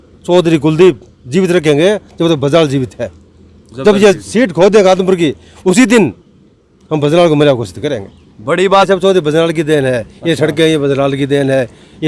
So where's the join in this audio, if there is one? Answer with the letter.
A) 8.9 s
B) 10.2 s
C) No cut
A